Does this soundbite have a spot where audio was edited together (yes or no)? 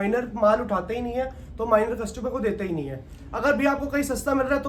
no